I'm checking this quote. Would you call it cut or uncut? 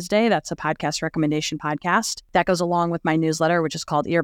cut